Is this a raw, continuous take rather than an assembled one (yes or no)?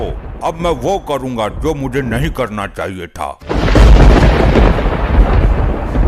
no